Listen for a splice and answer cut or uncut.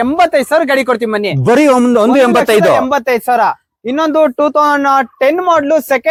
uncut